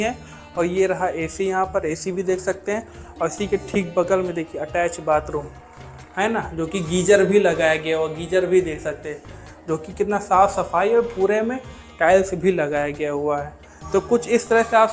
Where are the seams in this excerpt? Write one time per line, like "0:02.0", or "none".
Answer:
none